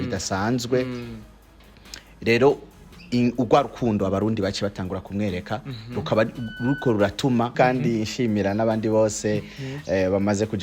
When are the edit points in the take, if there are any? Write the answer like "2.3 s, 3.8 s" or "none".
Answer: 7.5 s